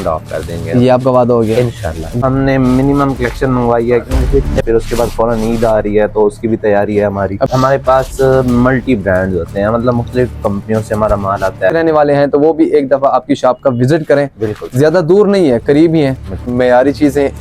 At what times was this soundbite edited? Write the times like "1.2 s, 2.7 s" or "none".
2.2 s, 4.6 s, 7.5 s, 11.7 s, 16.5 s

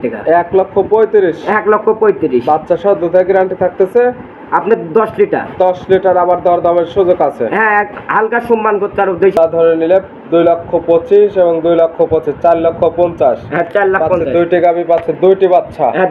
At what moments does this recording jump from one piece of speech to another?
9.4 s

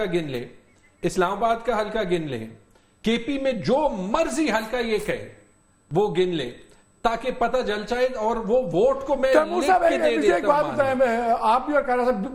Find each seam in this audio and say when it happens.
none

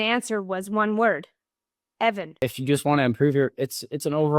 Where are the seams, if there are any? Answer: 2.3 s

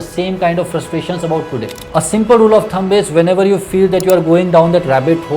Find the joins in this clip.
1.8 s

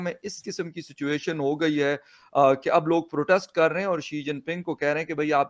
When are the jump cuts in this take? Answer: none

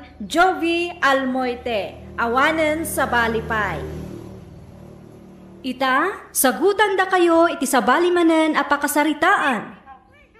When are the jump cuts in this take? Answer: none

